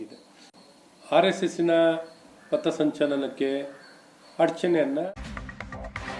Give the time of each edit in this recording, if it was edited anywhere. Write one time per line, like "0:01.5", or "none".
0:05.1